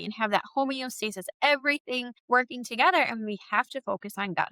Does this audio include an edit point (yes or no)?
yes